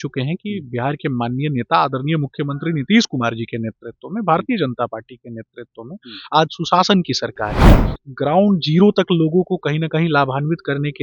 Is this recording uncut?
yes; 0 cuts

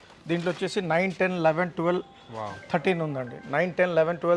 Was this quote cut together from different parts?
no; 0 cuts

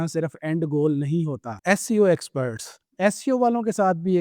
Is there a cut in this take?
yes; 1 cut; at 1.5 s

